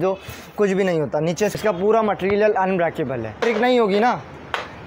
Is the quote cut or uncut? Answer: cut